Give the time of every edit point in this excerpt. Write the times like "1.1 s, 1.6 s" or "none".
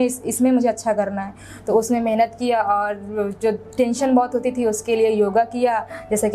none

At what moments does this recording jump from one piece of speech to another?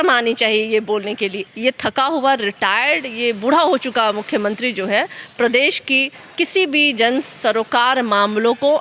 1.5 s

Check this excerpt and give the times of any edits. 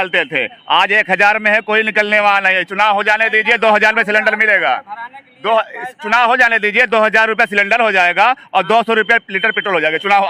none

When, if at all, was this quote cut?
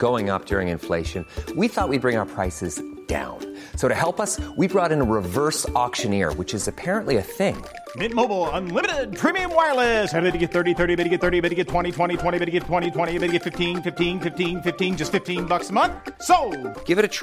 none

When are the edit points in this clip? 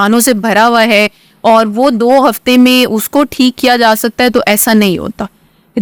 none

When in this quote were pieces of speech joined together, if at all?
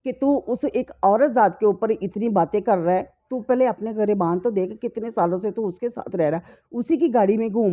none

